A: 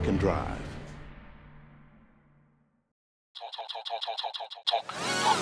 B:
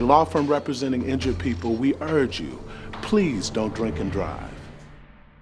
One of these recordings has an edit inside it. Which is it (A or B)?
A